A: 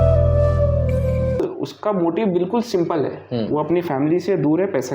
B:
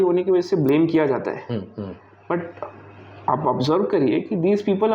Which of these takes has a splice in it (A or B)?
A